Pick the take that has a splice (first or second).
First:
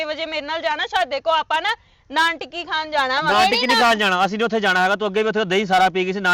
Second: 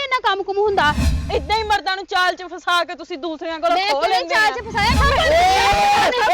second